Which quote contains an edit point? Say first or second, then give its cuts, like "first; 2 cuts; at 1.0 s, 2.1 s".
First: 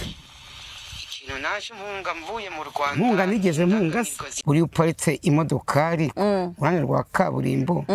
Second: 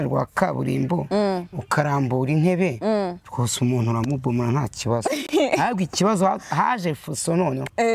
first; 1 cut; at 4.3 s